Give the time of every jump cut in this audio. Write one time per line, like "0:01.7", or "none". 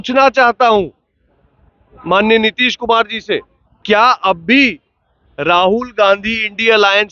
0:03.8